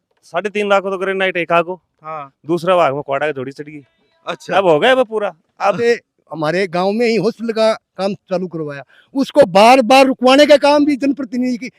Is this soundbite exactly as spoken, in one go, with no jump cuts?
no; 1 cut; at 5.8 s

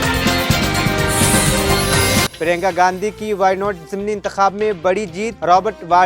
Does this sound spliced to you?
yes; 1 cut; at 2.3 s

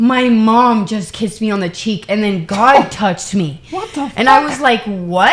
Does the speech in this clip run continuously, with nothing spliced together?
yes; 0 cuts

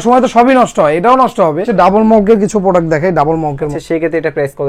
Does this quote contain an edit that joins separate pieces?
yes; 2 cuts; at 1.7 s, 3.8 s

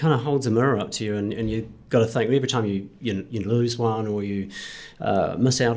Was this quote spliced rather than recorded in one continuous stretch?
no; 0 cuts

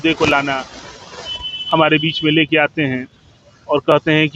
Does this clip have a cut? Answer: no; 0 cuts

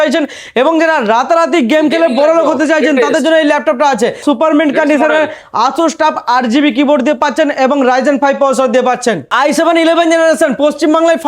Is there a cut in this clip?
yes; 2 cuts; at 4.2 s, 9.3 s

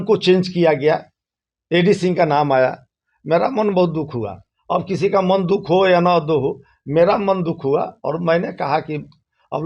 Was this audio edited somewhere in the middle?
no; 0 cuts

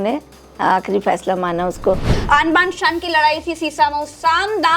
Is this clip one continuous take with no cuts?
no; 1 cut; at 2.1 s

